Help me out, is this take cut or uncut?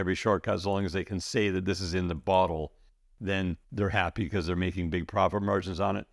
uncut